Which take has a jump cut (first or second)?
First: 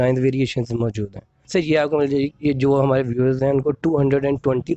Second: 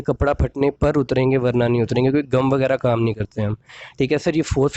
first